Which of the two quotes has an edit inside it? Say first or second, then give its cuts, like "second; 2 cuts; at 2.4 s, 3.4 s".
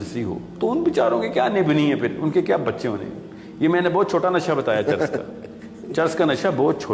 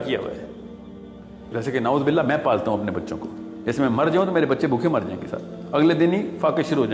second; 1 cut; at 1.5 s